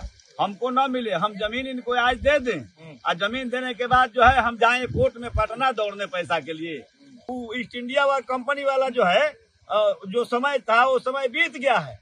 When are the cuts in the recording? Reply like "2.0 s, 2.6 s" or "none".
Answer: 7.2 s

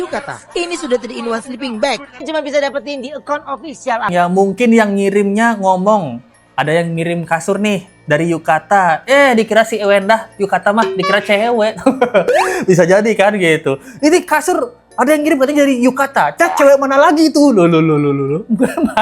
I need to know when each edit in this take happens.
2.3 s, 4.1 s

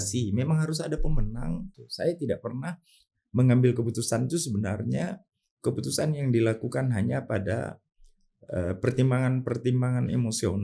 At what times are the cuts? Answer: 1.8 s

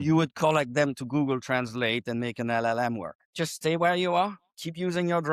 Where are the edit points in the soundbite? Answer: 3.2 s

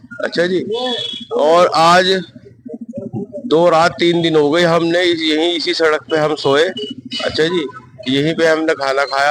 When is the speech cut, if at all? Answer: none

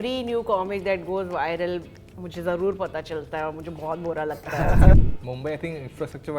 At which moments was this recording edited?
4.9 s

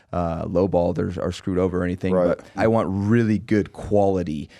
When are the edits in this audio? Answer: 2.6 s

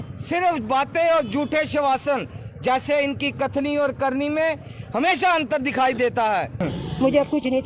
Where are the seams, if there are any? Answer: 6.5 s

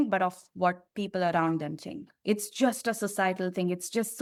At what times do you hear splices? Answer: none

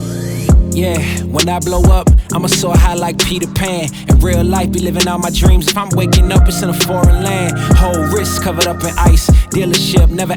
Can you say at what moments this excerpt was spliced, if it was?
none

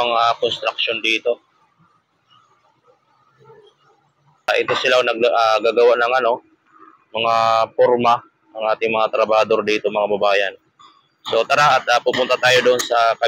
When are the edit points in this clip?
4.5 s

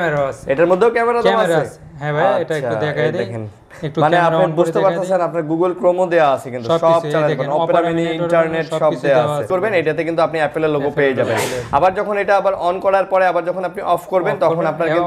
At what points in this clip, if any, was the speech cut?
9.4 s

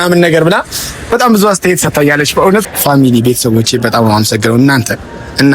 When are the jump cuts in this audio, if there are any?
2.6 s

